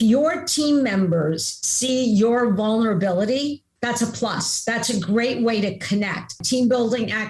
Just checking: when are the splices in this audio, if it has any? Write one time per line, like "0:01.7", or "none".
0:06.4

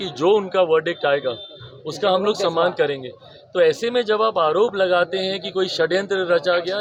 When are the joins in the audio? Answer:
none

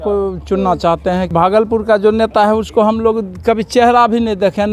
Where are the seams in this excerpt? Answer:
0:01.3

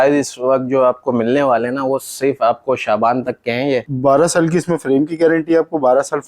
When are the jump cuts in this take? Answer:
0:03.9

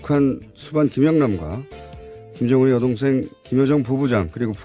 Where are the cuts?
none

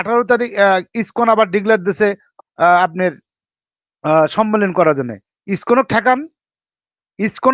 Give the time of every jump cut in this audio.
none

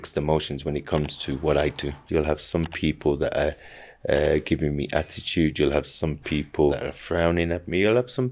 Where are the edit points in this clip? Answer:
0:01.9
0:06.8

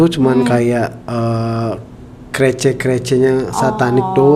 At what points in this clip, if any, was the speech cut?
none

